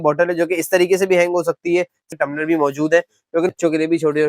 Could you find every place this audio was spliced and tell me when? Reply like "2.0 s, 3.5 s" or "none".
2.1 s, 3.5 s